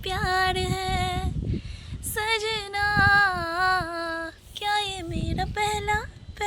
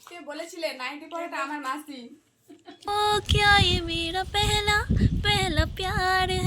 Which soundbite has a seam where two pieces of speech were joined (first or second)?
second